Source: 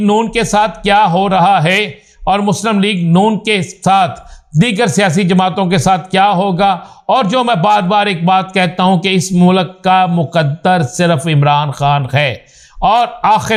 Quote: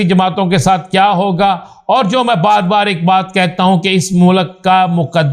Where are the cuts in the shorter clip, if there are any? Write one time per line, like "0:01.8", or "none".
none